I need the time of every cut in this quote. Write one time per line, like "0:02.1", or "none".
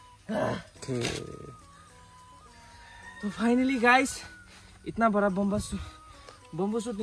none